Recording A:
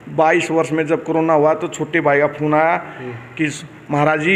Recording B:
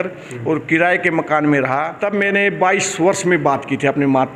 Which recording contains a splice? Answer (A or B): B